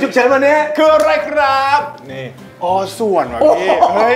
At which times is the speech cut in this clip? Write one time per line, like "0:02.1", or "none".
none